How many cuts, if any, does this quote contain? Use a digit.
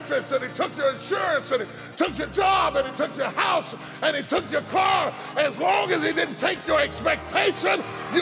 0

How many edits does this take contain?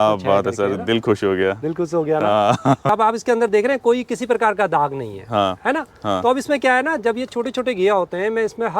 1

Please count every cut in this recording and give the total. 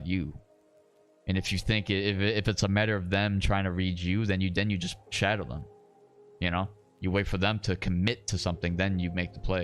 0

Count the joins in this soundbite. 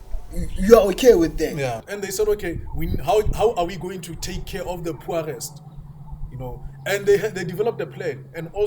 1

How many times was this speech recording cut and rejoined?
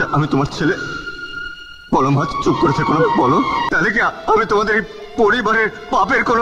1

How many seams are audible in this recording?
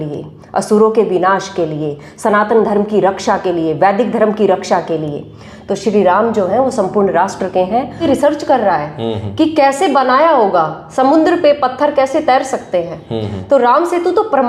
1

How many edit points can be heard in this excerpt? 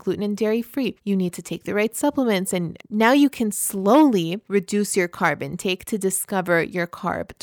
3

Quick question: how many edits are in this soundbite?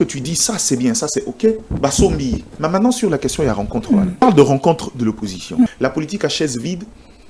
3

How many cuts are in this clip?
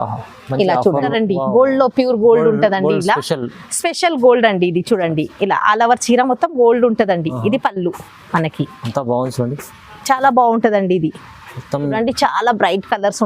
2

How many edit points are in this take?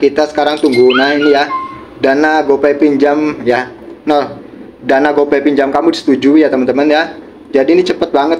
0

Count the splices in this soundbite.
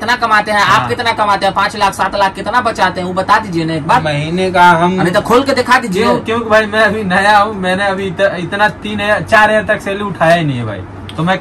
0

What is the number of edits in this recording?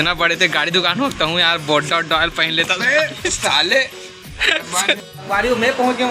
1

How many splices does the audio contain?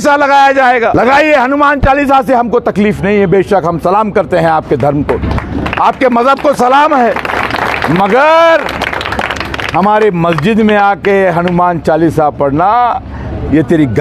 1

